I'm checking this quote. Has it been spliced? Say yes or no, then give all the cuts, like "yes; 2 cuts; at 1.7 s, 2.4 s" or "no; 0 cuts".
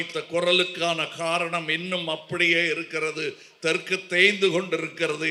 no; 0 cuts